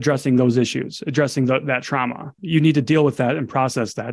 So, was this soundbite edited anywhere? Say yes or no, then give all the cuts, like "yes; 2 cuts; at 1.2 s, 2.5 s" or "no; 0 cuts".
yes; 1 cut; at 2.4 s